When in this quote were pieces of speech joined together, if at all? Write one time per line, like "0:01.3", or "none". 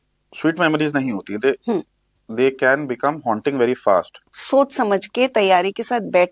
0:04.2